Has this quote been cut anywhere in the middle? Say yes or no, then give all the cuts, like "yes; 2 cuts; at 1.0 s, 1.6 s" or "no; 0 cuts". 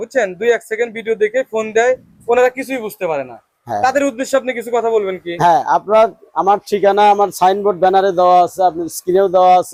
no; 0 cuts